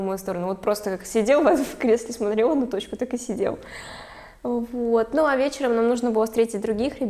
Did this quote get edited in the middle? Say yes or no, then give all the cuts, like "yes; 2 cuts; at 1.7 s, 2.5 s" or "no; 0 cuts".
no; 0 cuts